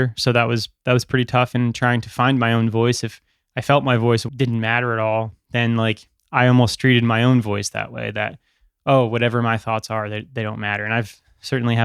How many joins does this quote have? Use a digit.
1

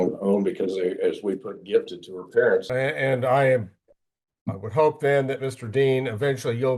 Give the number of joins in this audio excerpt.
1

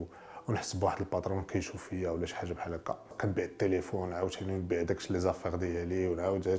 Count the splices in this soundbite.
1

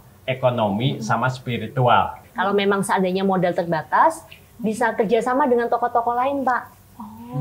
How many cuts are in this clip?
1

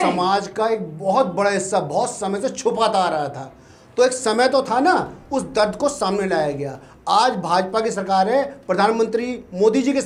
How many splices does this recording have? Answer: 0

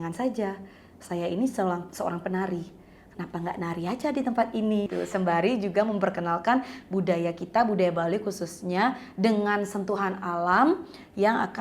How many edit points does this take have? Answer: 1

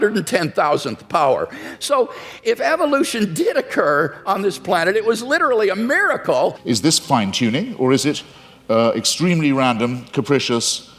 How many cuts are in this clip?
1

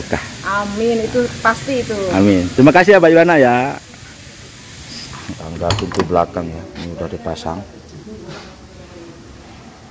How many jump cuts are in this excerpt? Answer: 1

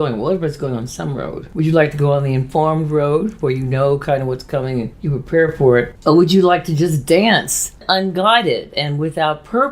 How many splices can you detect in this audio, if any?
1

